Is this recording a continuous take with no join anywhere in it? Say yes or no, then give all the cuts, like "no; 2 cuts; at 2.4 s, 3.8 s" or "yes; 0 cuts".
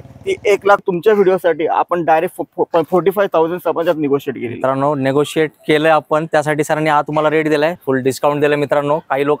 no; 2 cuts; at 0.8 s, 7.8 s